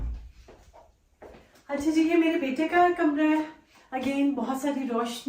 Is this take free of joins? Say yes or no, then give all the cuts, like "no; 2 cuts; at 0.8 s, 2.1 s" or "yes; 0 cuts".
yes; 0 cuts